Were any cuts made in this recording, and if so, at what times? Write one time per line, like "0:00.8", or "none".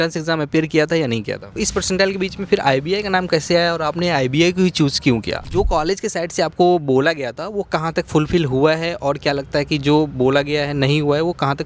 0:01.6
0:05.4